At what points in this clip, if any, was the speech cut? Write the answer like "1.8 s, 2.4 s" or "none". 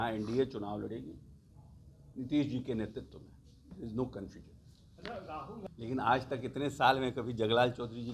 5.7 s